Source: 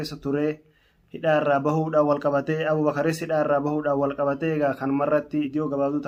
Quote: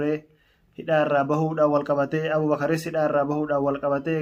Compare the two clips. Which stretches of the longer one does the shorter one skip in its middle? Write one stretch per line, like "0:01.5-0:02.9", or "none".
none